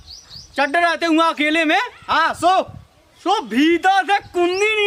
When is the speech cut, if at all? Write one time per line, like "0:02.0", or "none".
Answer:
none

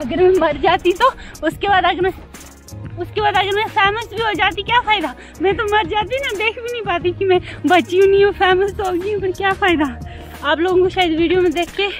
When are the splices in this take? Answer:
none

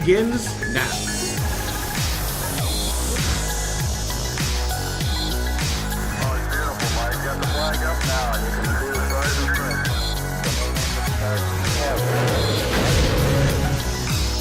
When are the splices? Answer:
none

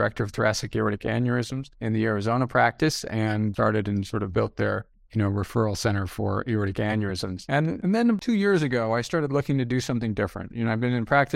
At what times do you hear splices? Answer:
0:07.8

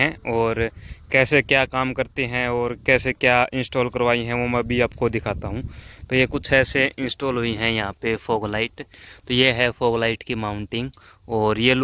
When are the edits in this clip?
none

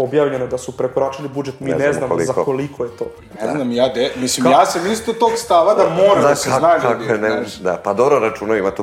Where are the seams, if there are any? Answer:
none

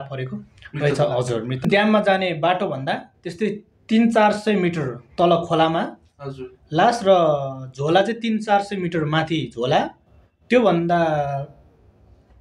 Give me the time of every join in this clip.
0:01.7

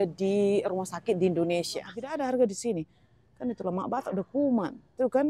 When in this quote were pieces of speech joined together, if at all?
0:02.0

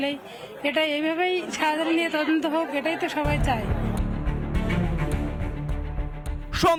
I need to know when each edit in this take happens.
none

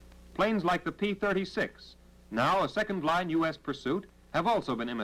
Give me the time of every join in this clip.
none

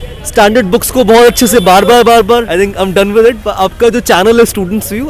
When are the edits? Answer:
0:02.5

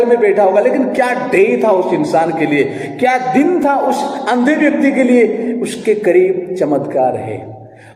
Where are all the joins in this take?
none

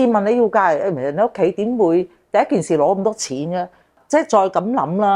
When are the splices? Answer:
0:03.9

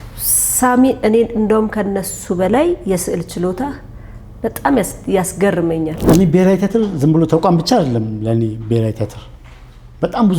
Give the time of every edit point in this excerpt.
0:06.0

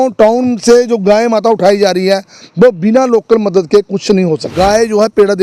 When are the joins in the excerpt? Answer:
0:04.5

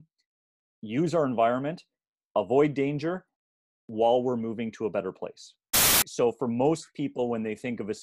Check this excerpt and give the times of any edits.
0:06.0

